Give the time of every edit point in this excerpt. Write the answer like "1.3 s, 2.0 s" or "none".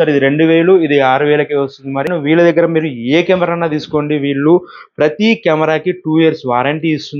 2.1 s